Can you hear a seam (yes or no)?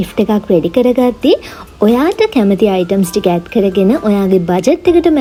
no